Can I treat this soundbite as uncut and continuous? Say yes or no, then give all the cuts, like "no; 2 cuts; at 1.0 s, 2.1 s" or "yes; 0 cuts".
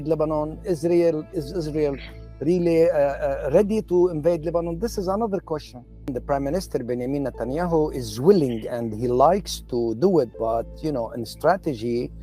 no; 1 cut; at 6.1 s